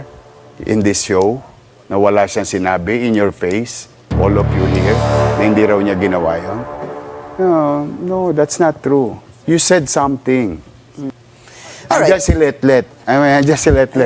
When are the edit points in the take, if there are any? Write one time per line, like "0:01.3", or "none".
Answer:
0:11.1